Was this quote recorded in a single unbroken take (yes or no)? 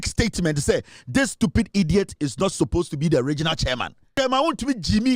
no